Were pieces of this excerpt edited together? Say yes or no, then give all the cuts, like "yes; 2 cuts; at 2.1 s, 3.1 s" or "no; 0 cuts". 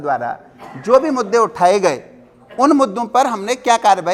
no; 0 cuts